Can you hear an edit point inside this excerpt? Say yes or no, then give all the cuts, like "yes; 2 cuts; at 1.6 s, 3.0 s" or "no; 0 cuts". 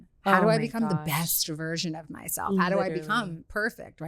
no; 0 cuts